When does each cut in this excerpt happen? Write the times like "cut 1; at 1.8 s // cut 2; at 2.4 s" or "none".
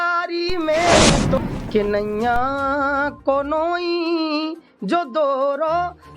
cut 1; at 1.4 s